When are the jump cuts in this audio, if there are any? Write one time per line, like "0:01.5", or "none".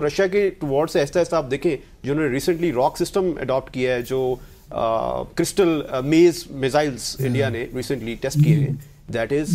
none